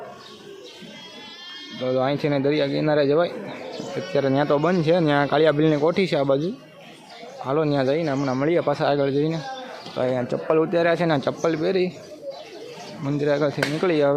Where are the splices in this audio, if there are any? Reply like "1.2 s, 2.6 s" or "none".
none